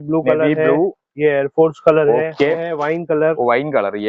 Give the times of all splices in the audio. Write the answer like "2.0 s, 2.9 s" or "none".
2.6 s